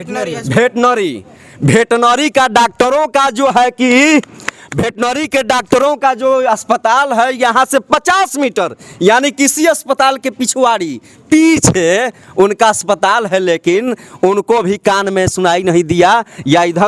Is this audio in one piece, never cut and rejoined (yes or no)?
yes